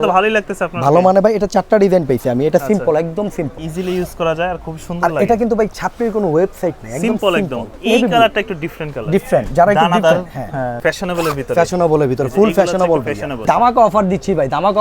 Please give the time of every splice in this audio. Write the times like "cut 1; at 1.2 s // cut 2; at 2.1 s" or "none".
cut 1; at 3.6 s // cut 2; at 7.7 s // cut 3; at 10.7 s // cut 4; at 13.4 s

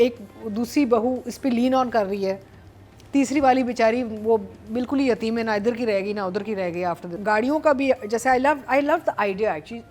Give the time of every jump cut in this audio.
cut 1; at 7.1 s

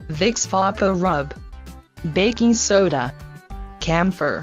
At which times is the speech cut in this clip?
cut 1; at 0.9 s

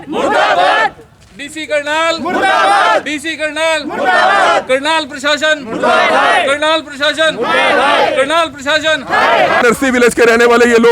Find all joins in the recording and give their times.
cut 1; at 9.6 s

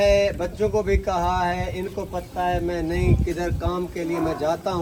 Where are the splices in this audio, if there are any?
none

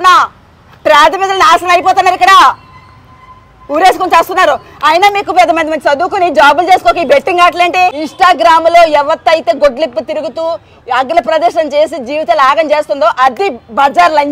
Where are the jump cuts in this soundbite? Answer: cut 1; at 8.0 s

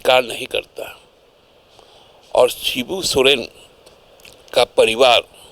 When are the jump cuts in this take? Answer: none

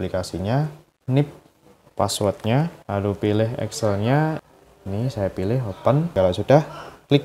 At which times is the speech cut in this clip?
cut 1; at 6.1 s

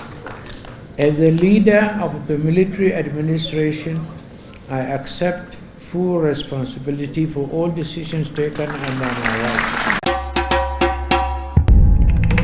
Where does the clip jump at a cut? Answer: cut 1; at 10.0 s

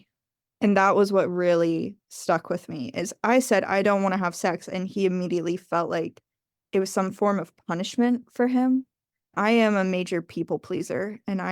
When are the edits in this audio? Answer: cut 1; at 9.3 s

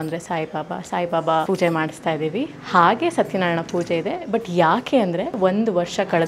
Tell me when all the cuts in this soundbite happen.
cut 1; at 1.5 s // cut 2; at 5.3 s

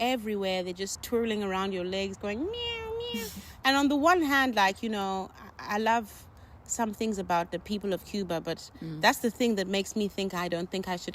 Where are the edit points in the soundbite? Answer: cut 1; at 1.0 s

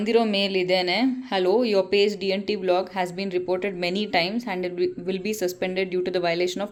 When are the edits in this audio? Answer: none

